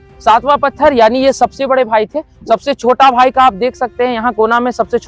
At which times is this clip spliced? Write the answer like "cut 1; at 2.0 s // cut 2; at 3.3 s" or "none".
cut 1; at 2.4 s